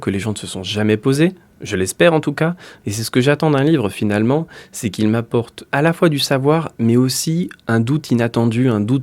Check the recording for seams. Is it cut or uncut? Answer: cut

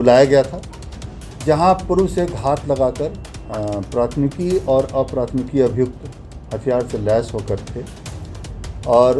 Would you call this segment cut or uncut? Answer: uncut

